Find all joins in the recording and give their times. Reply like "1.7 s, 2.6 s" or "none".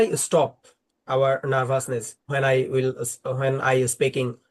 none

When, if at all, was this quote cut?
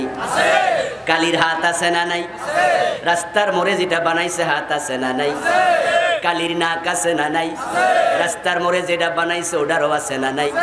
none

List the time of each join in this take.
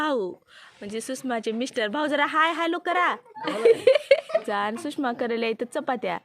4.4 s

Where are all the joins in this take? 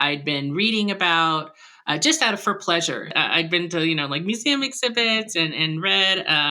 3.1 s

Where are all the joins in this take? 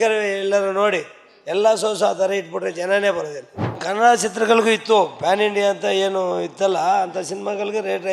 3.8 s

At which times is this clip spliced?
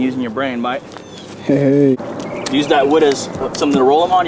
1.9 s

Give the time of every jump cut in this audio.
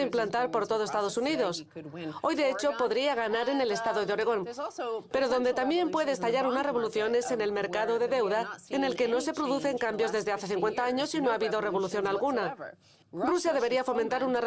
5.6 s

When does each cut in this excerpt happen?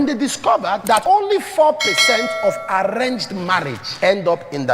0.9 s, 3.8 s

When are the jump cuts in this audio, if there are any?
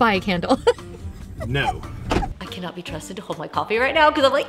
2.4 s

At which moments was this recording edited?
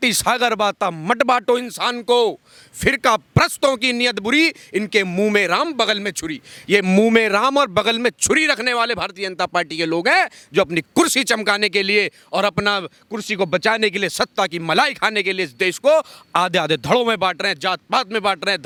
none

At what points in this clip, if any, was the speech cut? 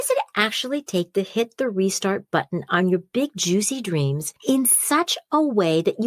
4.3 s

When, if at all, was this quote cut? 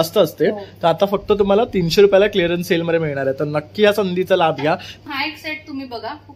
5.0 s

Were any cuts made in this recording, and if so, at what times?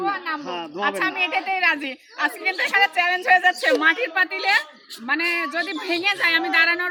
none

